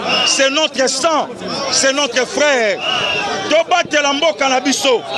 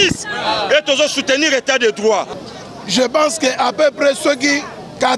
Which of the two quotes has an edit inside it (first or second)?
second